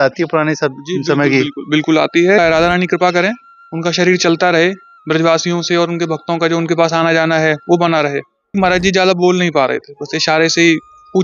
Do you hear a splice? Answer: yes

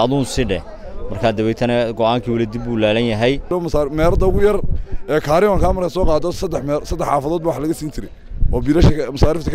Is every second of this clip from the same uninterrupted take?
no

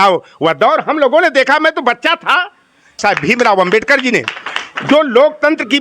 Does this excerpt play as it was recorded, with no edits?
no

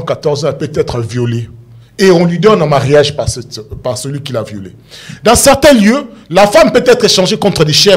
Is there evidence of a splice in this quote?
no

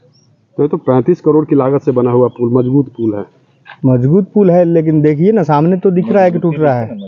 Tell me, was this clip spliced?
no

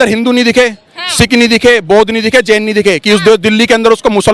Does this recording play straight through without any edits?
yes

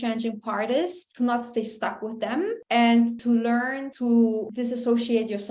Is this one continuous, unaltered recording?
no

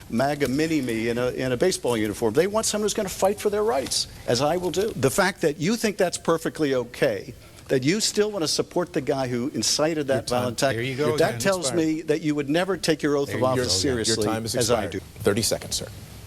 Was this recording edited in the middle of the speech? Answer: yes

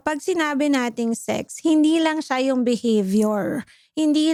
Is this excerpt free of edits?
yes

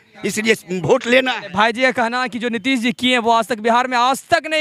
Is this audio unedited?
yes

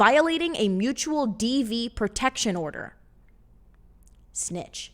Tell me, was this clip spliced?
no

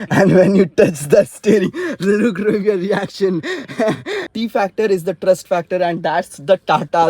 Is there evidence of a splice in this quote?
yes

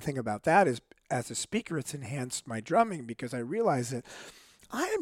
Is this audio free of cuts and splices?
yes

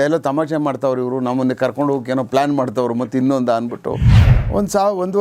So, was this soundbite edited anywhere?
yes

